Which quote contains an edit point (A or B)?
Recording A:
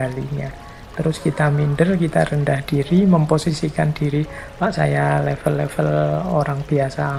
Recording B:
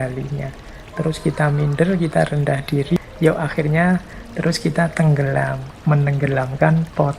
B